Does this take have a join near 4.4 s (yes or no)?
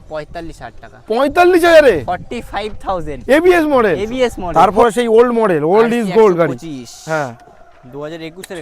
yes